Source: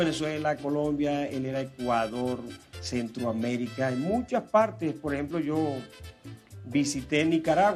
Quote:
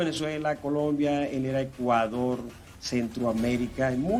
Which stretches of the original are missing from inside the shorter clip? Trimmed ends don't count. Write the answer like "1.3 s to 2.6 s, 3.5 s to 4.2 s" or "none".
none